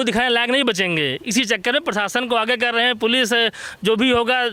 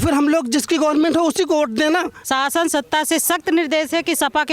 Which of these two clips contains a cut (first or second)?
second